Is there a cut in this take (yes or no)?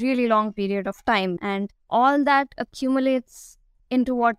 yes